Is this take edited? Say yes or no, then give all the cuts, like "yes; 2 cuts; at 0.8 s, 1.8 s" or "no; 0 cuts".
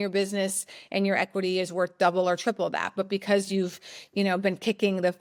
no; 0 cuts